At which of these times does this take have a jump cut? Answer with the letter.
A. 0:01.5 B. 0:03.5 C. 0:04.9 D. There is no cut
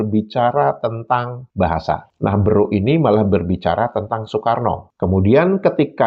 C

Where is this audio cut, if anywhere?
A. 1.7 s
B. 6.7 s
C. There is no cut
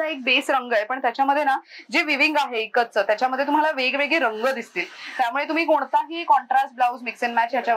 C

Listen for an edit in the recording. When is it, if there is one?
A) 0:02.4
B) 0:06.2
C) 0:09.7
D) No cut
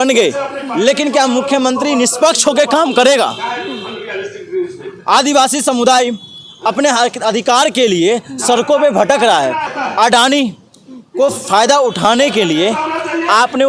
C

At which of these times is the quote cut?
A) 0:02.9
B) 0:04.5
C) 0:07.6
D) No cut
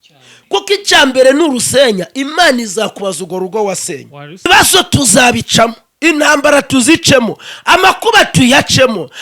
B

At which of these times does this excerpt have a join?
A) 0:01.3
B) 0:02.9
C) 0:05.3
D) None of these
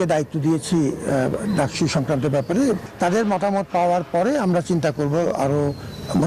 B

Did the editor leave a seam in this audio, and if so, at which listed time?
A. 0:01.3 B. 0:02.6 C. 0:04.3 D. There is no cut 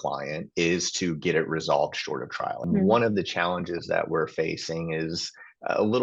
B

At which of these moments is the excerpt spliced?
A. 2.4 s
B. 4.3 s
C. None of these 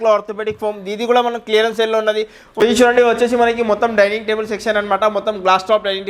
A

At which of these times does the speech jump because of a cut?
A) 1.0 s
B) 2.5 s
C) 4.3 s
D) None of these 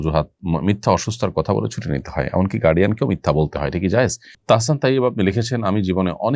C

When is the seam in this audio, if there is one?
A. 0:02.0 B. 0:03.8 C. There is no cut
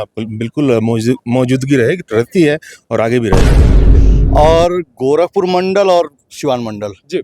B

